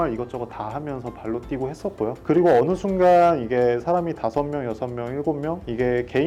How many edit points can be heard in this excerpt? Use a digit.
0